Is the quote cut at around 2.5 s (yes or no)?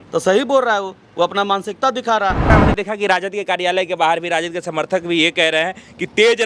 yes